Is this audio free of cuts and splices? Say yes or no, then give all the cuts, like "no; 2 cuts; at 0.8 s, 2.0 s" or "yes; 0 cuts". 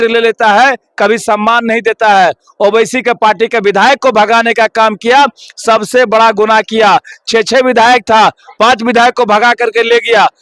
yes; 0 cuts